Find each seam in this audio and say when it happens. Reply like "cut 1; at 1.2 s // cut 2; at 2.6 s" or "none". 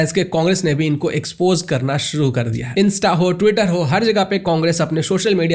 cut 1; at 2.6 s